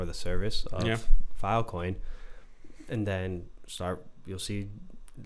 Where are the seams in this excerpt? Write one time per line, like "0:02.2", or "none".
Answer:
none